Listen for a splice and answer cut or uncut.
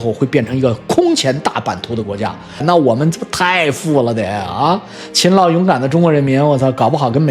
cut